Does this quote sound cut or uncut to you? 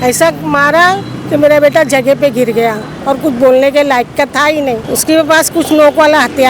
cut